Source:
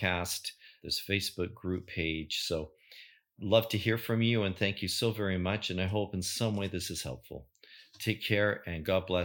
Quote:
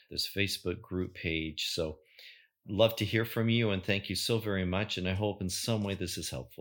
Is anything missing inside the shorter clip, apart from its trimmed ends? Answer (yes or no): no